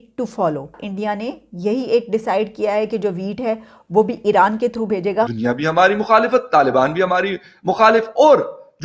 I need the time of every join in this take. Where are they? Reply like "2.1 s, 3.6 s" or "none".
0.8 s, 5.3 s